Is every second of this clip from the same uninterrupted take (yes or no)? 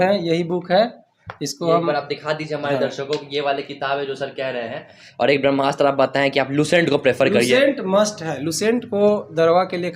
no